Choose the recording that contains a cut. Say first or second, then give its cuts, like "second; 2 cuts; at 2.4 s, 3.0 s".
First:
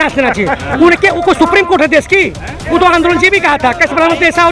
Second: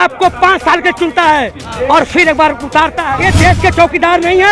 second; 1 cut; at 3.0 s